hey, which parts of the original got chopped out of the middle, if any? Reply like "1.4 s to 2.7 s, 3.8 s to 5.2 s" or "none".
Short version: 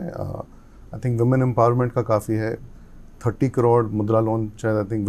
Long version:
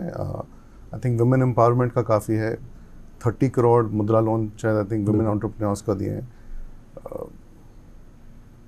none

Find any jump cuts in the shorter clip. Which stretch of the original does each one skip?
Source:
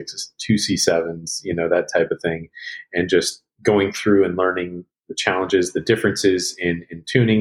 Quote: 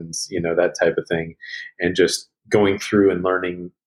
none

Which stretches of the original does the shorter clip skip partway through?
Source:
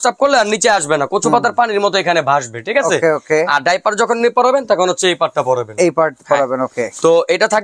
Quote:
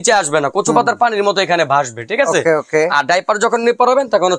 none

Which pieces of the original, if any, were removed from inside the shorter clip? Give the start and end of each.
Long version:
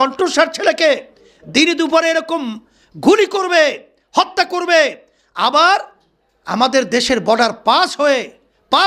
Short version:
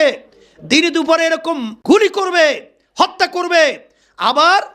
2.5 s to 2.9 s

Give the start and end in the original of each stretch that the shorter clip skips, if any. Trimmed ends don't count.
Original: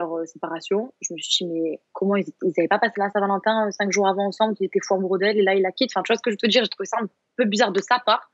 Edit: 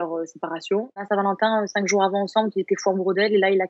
1.0 s to 3.1 s

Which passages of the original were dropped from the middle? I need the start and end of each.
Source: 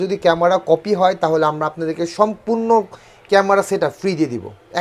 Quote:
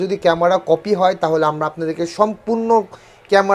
none

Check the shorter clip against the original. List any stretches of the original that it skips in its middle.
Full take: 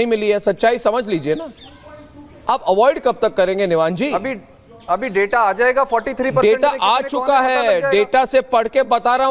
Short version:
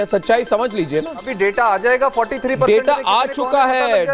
1.6 s to 5.0 s

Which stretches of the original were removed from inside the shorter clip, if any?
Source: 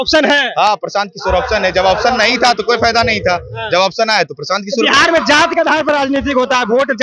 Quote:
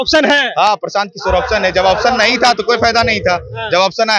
none

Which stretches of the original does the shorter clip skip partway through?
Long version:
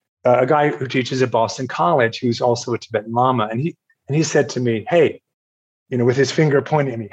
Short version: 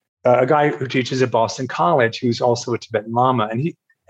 none

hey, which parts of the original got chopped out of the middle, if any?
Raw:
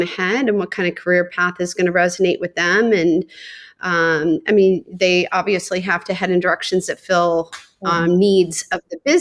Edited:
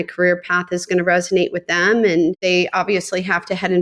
3.3 s to 5.0 s

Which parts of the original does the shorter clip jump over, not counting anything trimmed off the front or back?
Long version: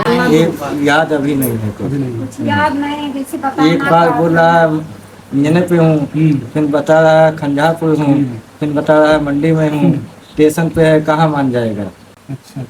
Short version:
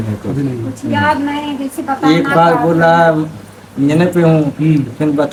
none

